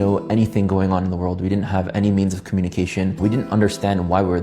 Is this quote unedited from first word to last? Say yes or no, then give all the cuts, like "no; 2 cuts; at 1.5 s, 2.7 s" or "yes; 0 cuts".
no; 1 cut; at 3.1 s